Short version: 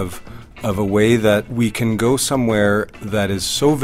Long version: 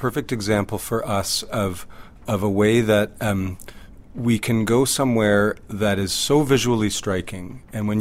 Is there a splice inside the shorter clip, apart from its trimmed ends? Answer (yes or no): yes